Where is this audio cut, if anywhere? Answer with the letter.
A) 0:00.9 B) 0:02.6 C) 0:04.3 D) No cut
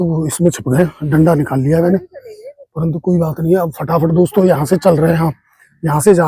D